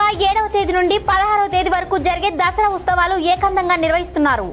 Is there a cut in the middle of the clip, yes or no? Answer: no